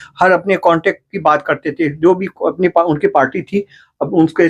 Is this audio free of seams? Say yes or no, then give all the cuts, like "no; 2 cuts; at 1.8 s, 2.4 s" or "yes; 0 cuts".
yes; 0 cuts